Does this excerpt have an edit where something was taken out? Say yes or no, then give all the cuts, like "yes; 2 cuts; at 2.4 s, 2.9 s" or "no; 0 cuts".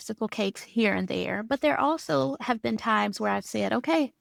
no; 0 cuts